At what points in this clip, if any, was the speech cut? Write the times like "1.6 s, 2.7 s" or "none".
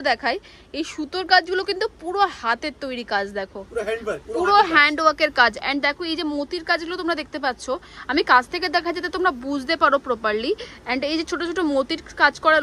none